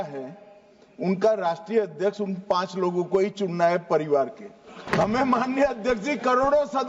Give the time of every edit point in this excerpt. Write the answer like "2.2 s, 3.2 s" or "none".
4.7 s